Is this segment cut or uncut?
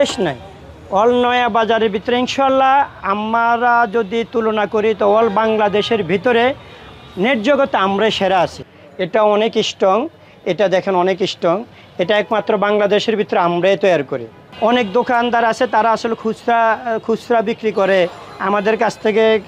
cut